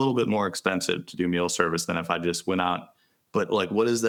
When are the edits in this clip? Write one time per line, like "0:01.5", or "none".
none